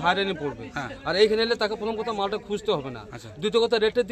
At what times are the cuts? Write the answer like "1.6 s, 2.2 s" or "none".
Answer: none